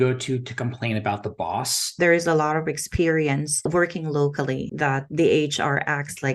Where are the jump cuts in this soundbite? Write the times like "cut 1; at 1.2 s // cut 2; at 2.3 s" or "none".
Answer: cut 1; at 1.9 s // cut 2; at 3.7 s // cut 3; at 4.7 s